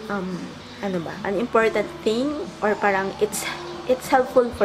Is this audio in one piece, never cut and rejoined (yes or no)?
yes